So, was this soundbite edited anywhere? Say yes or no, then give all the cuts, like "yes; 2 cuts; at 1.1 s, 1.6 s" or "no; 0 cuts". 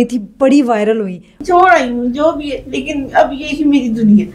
yes; 1 cut; at 1.4 s